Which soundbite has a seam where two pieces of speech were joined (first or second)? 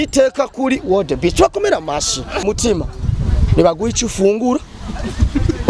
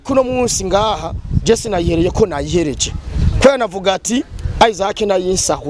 first